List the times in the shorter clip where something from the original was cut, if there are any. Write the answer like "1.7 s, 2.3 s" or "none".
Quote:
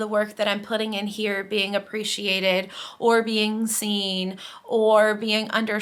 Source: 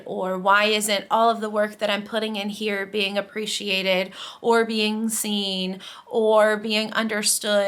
none